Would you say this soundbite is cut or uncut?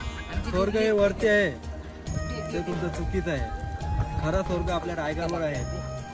uncut